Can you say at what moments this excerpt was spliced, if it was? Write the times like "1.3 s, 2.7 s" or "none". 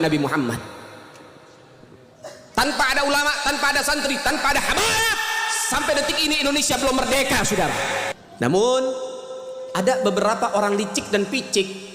8.2 s